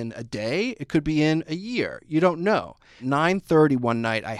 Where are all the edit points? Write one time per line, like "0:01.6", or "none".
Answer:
0:03.0

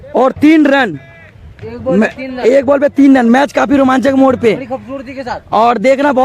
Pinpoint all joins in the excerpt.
none

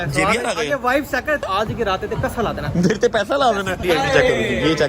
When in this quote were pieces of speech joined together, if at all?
0:01.4
0:03.8

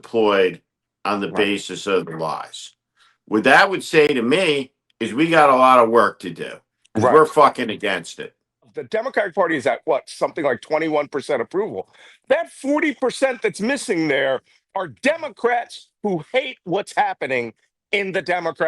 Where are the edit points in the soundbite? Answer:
0:08.8

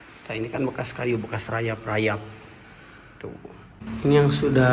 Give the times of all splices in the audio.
0:03.8

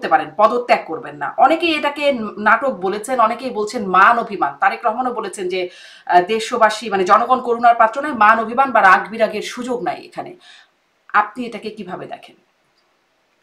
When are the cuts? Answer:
none

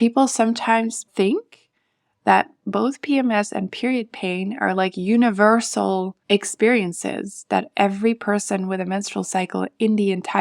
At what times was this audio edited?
0:01.1
0:06.1

